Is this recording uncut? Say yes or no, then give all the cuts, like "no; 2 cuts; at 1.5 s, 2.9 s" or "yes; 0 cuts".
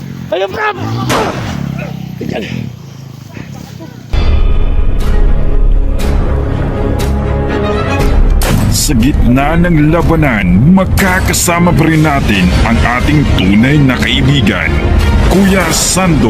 no; 1 cut; at 4.1 s